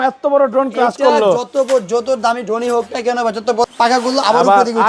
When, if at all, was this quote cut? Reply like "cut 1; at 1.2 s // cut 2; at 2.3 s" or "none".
cut 1; at 3.7 s

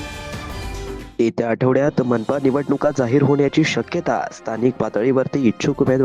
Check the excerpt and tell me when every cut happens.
cut 1; at 0.9 s

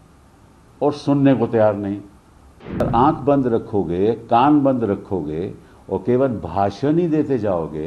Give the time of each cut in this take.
cut 1; at 2.9 s

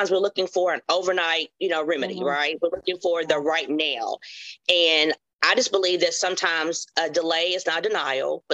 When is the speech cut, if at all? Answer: none

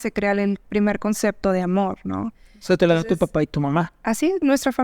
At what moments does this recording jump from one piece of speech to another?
none

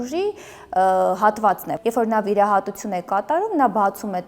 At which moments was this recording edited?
cut 1; at 1.7 s

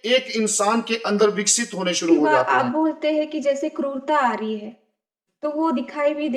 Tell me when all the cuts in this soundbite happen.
cut 1; at 2.5 s

